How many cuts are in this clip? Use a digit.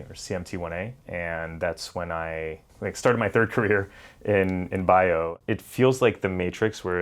3